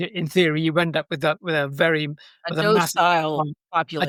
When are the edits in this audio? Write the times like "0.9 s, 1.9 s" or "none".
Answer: none